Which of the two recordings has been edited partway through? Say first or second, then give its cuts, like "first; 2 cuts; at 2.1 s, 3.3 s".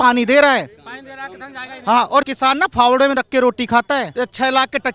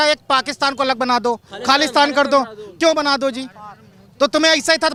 first; 2 cuts; at 2.3 s, 4.1 s